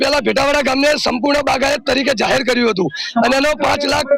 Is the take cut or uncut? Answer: uncut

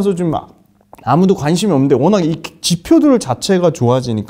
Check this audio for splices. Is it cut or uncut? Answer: uncut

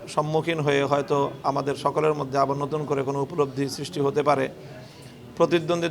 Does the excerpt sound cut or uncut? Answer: uncut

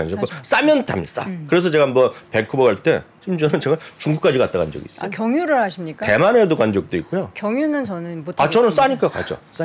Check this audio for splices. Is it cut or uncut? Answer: uncut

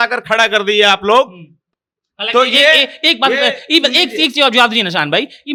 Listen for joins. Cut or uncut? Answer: uncut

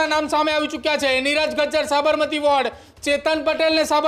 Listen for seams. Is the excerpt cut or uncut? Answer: uncut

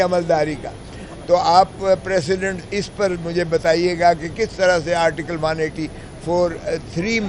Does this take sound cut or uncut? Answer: uncut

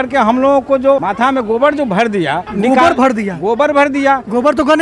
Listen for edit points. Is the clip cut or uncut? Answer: cut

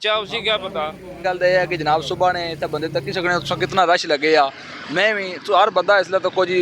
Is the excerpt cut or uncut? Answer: cut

